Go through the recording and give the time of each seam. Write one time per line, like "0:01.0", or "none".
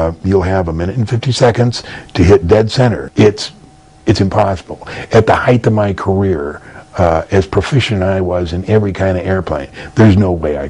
0:03.0